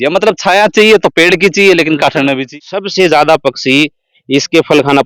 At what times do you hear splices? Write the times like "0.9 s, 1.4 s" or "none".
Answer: 2.6 s